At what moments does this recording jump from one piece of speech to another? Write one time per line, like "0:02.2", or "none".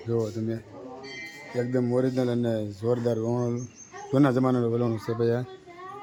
none